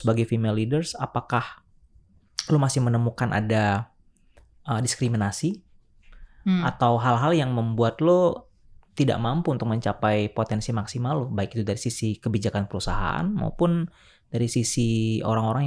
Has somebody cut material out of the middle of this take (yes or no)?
no